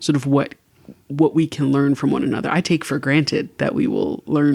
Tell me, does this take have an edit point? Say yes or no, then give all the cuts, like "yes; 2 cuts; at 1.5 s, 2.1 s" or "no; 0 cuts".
no; 0 cuts